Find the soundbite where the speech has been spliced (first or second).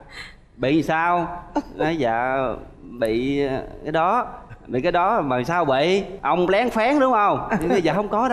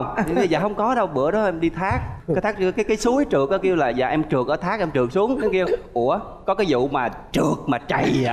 second